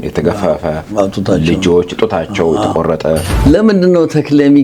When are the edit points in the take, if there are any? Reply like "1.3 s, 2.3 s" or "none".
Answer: 3.3 s